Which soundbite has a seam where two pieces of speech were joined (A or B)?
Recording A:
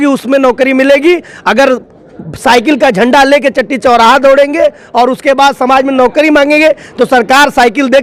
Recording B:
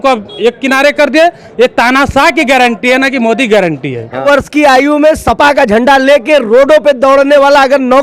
B